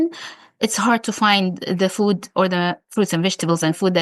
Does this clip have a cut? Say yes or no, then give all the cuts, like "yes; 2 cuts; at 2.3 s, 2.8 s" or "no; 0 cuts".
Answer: yes; 1 cut; at 2.8 s